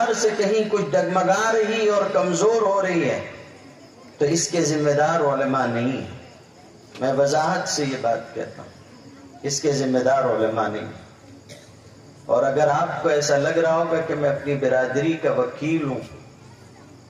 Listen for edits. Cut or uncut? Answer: uncut